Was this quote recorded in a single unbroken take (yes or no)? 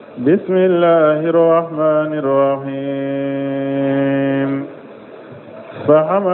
no